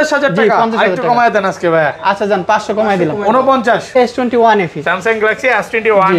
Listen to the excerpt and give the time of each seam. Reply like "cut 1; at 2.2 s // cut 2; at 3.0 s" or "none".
cut 1; at 4.0 s